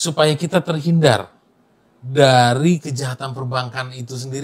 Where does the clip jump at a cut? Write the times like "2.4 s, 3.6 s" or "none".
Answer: none